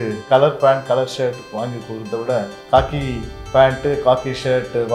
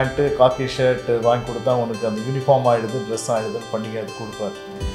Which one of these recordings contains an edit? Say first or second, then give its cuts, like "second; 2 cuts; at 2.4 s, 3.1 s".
first; 1 cut; at 2.6 s